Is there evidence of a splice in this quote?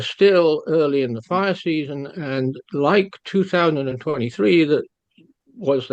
no; 0 cuts

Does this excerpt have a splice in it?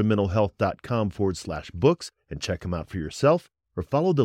no; 0 cuts

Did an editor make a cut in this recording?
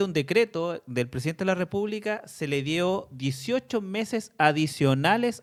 no; 0 cuts

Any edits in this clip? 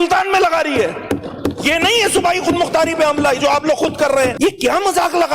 yes; 1 cut; at 4.3 s

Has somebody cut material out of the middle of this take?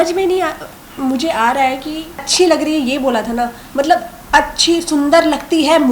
yes; 1 cut; at 2.3 s

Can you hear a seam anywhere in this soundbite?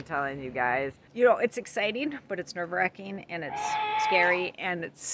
yes; 1 cut; at 1.0 s

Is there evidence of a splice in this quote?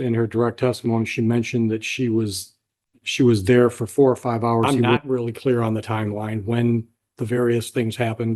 yes; 1 cut; at 4.8 s

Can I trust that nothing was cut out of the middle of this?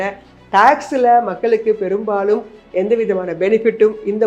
yes; 0 cuts

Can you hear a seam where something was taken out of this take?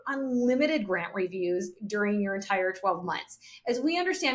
no; 0 cuts

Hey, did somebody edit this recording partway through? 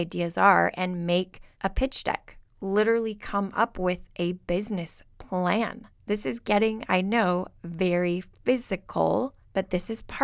yes; 3 cuts; at 1.4 s, 5.9 s, 9.4 s

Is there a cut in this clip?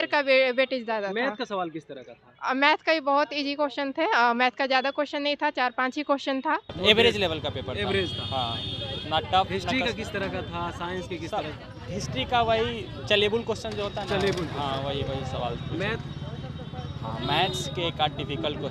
yes; 1 cut; at 6.7 s

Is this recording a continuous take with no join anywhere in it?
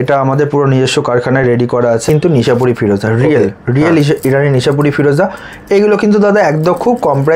no; 1 cut; at 2.0 s

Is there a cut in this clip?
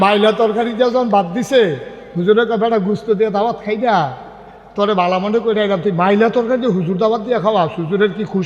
no; 0 cuts

